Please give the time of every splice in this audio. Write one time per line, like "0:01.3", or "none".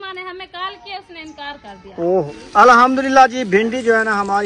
0:02.3